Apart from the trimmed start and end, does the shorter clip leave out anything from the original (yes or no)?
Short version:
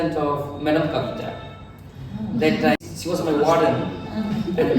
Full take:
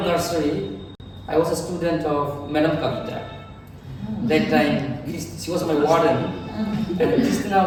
yes